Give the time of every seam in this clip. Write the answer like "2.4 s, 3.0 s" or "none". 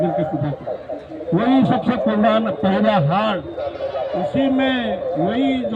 none